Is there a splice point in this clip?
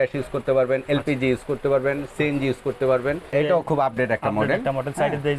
yes; 1 cut; at 3.3 s

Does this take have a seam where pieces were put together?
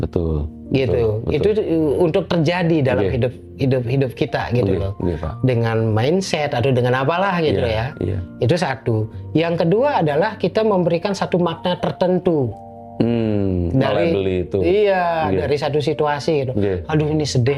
no; 0 cuts

